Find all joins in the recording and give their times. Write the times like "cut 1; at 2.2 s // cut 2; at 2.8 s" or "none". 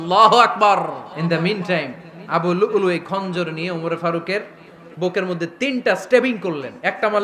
cut 1; at 1.1 s